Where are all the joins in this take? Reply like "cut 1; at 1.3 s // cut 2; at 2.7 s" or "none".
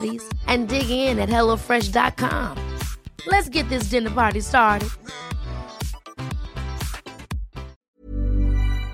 cut 1; at 7.9 s